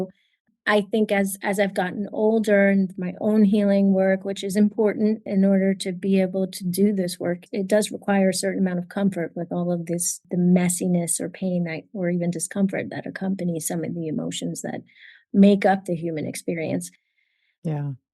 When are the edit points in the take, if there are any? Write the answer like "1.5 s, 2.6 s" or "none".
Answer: 5.2 s, 7.4 s, 10.2 s